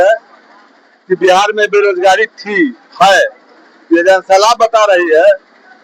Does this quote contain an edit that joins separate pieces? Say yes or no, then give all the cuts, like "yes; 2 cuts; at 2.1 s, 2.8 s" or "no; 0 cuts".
no; 0 cuts